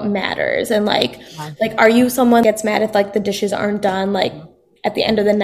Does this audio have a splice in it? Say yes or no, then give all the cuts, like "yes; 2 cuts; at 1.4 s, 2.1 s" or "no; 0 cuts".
yes; 1 cut; at 2.4 s